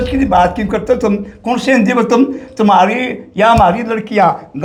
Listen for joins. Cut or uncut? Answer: uncut